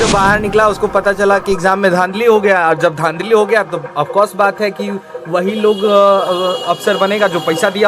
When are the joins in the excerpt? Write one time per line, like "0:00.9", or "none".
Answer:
none